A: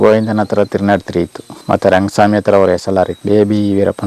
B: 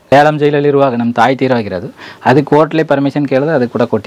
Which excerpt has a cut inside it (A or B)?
A